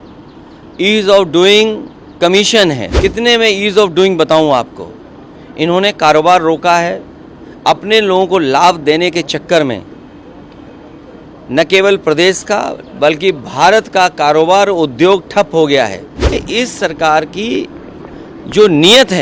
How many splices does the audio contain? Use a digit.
2